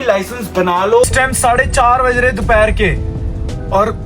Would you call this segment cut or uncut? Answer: cut